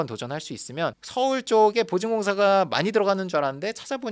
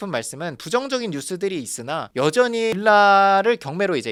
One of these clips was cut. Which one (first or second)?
first